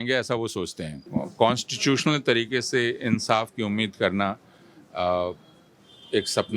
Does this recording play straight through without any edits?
no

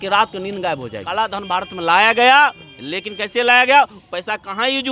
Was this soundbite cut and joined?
yes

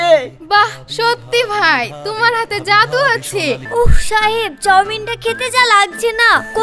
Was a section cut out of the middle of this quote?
yes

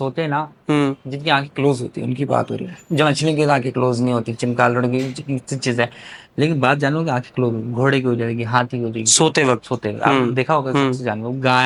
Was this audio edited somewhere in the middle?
no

